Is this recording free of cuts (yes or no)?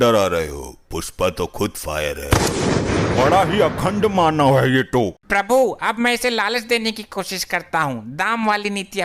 yes